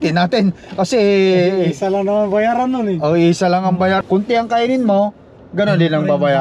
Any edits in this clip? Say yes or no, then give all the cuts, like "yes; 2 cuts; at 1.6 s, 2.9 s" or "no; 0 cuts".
yes; 1 cut; at 4.0 s